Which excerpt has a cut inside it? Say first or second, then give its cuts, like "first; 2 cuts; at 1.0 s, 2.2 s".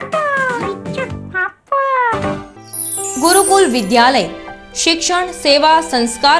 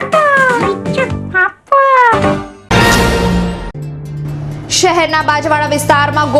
second; 1 cut; at 2.6 s